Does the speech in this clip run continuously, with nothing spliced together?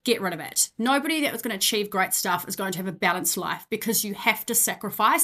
yes; 0 cuts

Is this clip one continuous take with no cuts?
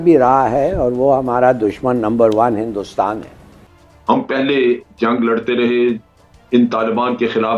no; 1 cut; at 3.8 s

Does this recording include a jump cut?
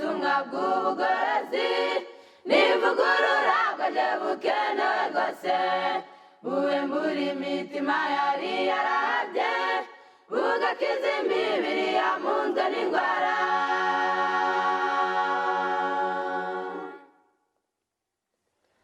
yes; 1 cut; at 5.9 s

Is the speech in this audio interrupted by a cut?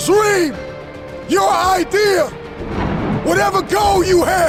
no; 0 cuts

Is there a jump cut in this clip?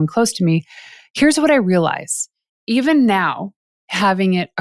yes; 1 cut; at 2.5 s

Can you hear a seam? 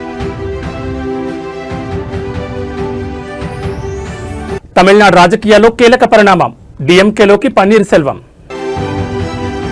yes; 2 cuts; at 4.3 s, 8.6 s

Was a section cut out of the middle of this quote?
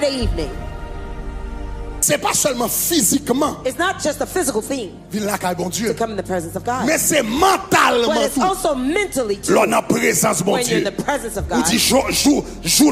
yes; 1 cut; at 2.0 s

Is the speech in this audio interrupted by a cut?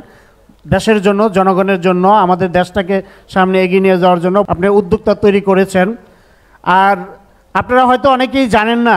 yes; 1 cut; at 4.5 s

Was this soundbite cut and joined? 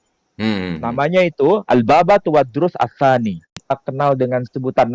yes; 1 cut; at 3.5 s

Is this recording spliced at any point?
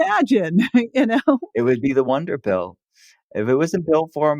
yes; 1 cut; at 1.5 s

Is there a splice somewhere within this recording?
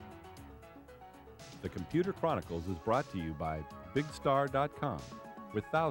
yes; 1 cut; at 1.6 s

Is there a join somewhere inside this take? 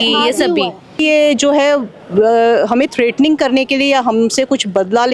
yes; 1 cut; at 1.0 s

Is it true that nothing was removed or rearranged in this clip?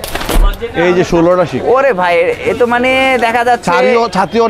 yes; 0 cuts

